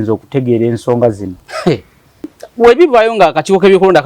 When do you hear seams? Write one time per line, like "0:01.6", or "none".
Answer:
0:02.4